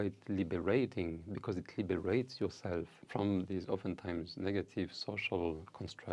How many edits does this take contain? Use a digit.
1